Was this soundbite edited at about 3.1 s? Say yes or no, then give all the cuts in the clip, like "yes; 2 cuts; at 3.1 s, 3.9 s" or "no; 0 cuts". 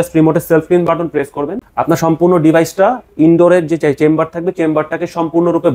no; 1 cut; at 1.6 s